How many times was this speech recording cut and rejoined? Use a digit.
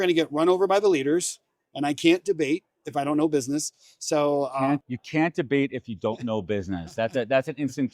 1